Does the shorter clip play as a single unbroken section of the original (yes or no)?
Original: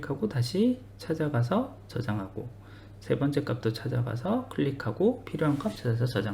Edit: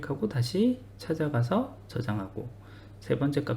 yes